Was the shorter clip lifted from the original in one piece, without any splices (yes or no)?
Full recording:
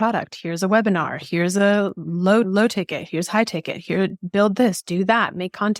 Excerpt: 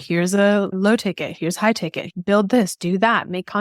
no